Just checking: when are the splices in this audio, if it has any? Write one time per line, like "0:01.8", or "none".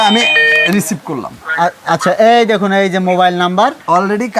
none